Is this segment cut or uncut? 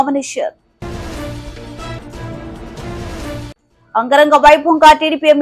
uncut